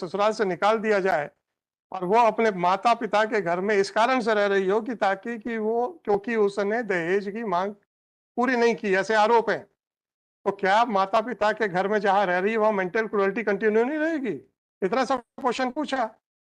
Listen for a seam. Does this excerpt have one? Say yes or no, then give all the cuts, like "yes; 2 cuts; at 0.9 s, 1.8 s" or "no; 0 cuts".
no; 0 cuts